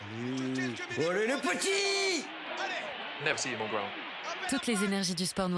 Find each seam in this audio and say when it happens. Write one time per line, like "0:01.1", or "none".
0:04.5